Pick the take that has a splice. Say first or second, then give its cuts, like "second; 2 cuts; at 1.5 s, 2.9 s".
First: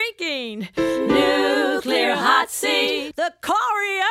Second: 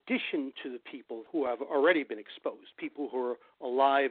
second; 1 cut; at 1.2 s